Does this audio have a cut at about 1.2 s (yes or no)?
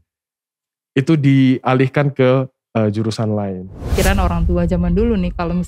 no